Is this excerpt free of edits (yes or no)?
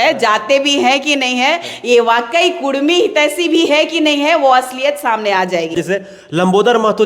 yes